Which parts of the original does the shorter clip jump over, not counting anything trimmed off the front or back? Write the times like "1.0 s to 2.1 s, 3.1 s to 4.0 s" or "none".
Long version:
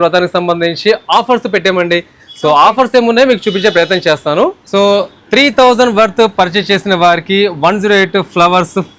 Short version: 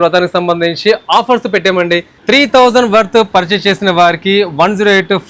2.1 s to 5.2 s